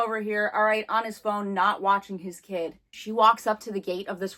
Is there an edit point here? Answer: no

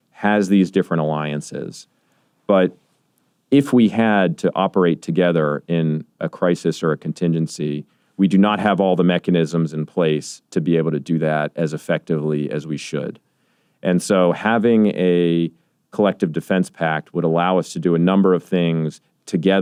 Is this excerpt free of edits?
yes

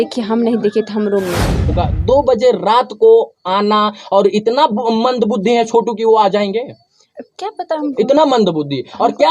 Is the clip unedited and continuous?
no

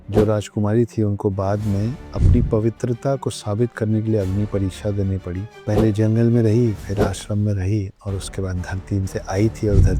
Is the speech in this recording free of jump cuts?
yes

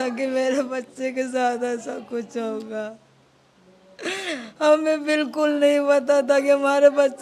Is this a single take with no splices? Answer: yes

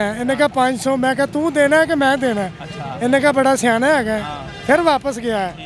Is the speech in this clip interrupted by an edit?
no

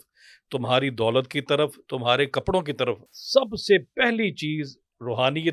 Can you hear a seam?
yes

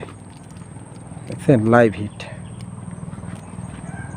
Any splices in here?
no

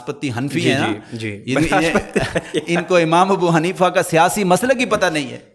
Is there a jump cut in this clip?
no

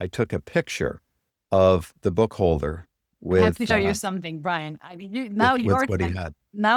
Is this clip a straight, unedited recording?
yes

